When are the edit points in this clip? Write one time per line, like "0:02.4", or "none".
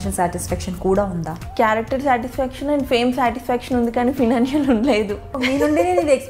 0:01.4
0:05.4